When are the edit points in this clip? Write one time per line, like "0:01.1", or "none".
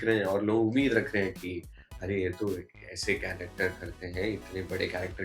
none

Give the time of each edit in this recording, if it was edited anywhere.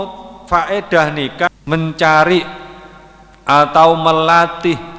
0:01.5

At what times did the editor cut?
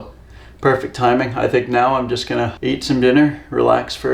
0:02.6

